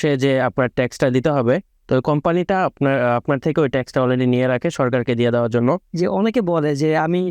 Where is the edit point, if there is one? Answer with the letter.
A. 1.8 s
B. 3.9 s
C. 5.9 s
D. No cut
C